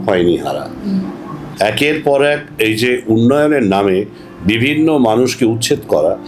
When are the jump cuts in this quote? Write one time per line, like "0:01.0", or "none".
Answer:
0:01.5